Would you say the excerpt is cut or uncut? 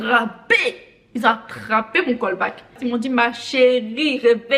uncut